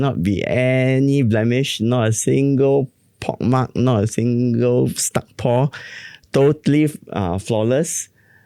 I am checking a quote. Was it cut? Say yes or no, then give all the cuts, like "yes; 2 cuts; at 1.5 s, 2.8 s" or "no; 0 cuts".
no; 0 cuts